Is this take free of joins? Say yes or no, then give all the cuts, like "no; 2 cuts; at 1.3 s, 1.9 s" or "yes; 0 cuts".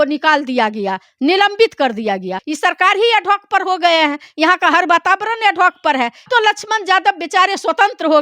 no; 2 cuts; at 2.4 s, 6.2 s